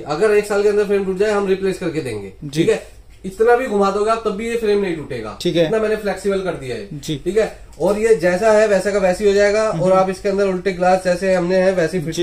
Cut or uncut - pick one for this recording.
uncut